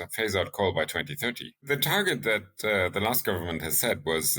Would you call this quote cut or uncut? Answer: cut